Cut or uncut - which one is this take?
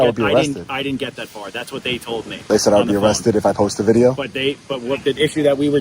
cut